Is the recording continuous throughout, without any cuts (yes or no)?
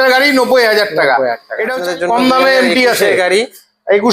no